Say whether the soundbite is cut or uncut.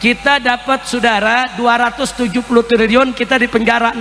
uncut